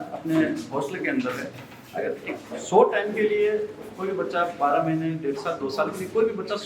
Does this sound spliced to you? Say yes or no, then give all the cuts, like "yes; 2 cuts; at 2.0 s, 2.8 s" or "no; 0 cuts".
no; 0 cuts